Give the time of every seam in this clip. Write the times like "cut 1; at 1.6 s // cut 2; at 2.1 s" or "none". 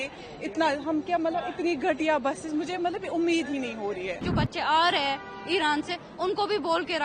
cut 1; at 4.2 s